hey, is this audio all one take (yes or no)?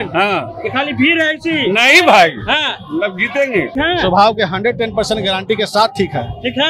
no